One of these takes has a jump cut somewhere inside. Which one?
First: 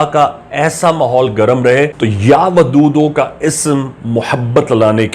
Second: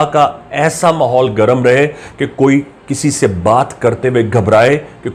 first; 1 cut; at 1.9 s

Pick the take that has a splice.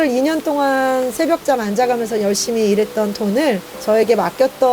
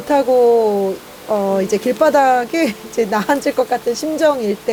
first; 1 cut; at 3.7 s

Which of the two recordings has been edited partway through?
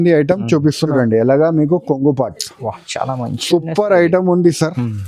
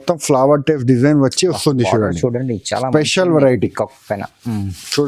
first; 1 cut; at 0.9 s

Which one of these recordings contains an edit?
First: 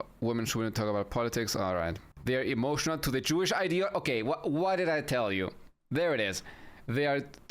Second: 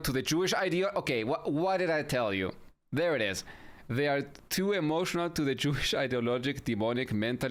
first; 1 cut; at 2.1 s

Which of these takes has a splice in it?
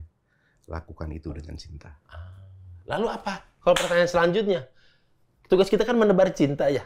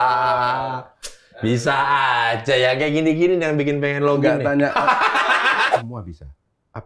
second; 1 cut; at 5.7 s

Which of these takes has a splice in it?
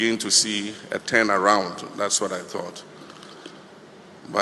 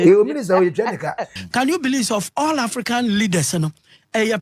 second; 1 cut; at 1.3 s

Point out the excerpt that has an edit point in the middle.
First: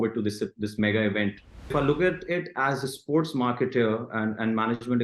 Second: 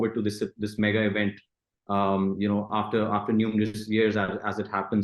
first; 1 cut; at 1.7 s

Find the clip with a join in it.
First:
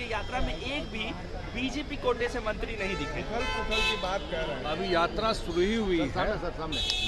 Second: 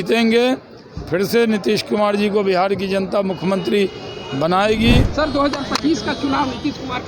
second; 1 cut; at 5.1 s

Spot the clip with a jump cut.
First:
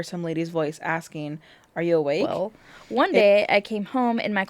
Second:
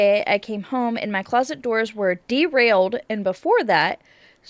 first; 1 cut; at 2.3 s

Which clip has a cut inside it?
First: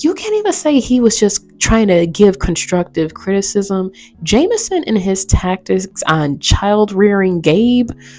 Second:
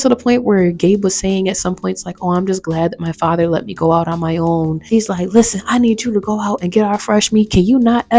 second; 1 cut; at 4.9 s

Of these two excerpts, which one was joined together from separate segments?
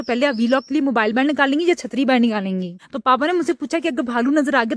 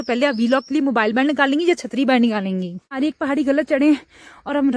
second; 1 cut; at 3.0 s

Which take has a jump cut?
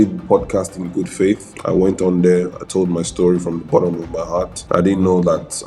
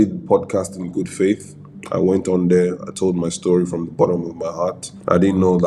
first; 2 cuts; at 1.5 s, 4.6 s

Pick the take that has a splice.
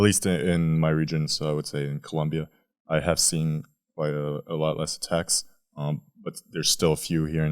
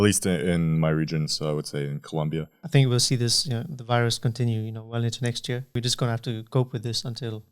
second; 2 cuts; at 2.6 s, 5.7 s

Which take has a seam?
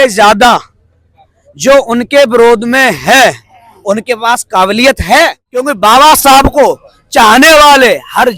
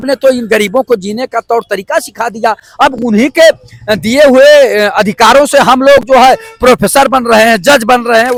first; 1 cut; at 5.5 s

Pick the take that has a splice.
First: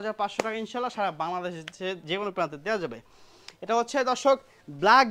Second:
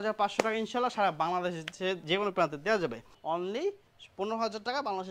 second; 1 cut; at 3.1 s

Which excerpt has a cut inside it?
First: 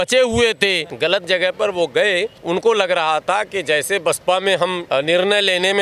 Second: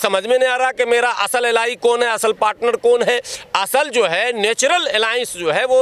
first; 3 cuts; at 0.9 s, 2.3 s, 4.8 s

